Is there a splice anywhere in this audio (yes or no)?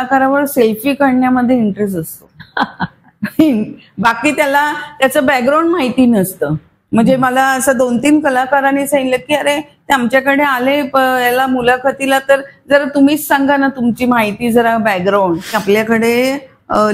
yes